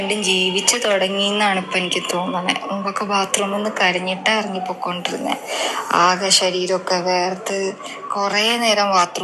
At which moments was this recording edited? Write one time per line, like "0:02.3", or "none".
none

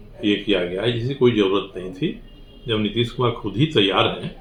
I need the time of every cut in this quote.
none

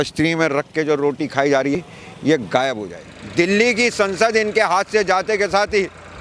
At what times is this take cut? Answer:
0:01.8
0:02.9

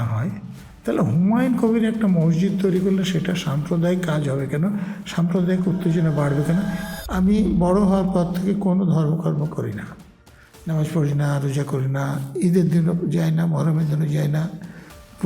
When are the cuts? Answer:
0:06.9

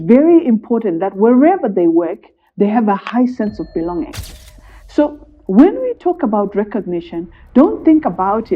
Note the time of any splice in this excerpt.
0:04.5

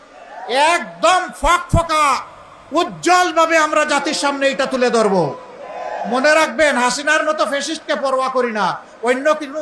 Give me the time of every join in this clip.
none

